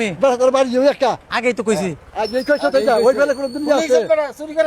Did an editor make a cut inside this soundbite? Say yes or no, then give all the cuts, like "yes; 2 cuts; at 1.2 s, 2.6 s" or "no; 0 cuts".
yes; 1 cut; at 1.1 s